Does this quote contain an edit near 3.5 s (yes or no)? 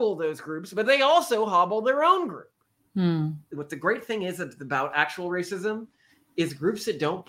yes